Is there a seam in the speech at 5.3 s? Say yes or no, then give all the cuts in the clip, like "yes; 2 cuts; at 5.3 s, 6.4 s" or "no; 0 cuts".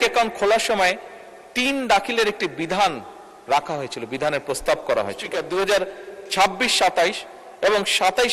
yes; 1 cut; at 5.3 s